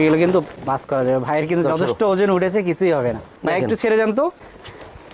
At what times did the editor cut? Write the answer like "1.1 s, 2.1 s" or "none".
3.4 s